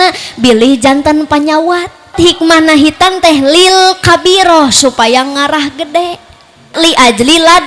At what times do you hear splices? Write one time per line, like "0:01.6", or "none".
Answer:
0:02.1
0:06.7